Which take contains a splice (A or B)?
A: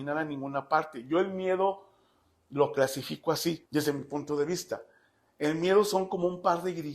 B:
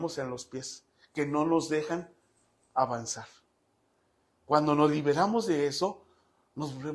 A